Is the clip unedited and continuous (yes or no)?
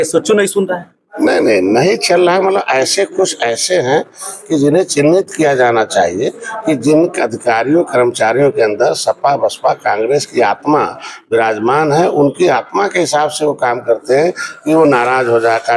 yes